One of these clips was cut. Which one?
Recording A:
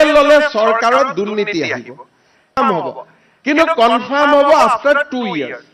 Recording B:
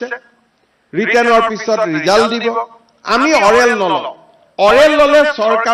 A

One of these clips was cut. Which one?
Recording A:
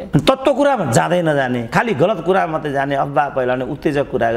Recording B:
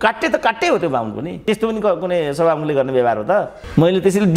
B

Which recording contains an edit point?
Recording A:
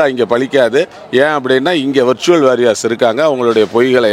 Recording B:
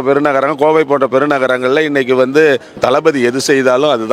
B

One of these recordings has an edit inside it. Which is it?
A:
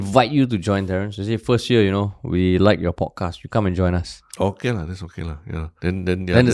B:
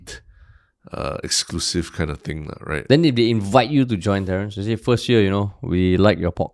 A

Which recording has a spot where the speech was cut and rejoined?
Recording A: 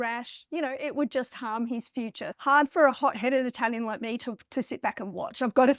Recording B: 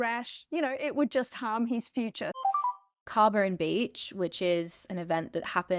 B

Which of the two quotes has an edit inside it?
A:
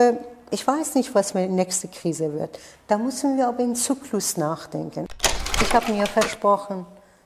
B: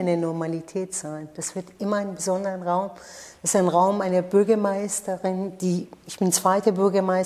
A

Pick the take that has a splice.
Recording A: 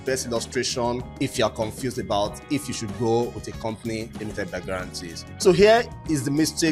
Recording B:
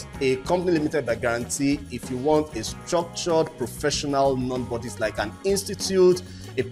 A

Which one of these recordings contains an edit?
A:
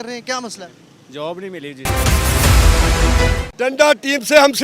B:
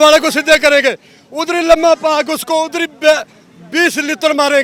A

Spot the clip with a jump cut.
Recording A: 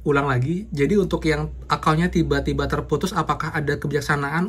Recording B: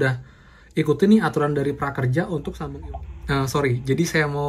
B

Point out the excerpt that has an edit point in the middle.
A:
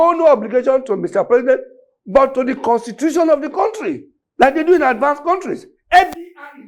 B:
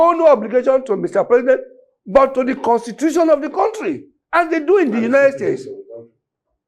A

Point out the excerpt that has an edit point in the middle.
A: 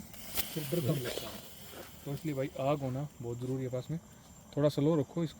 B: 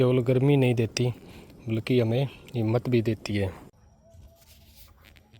B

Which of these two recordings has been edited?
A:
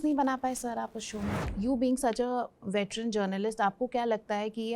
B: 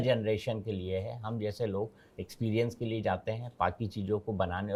A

